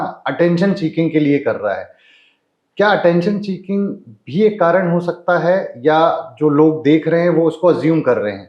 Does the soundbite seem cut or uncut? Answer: uncut